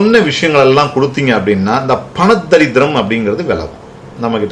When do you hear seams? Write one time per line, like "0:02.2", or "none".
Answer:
none